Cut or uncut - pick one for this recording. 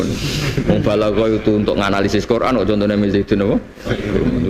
uncut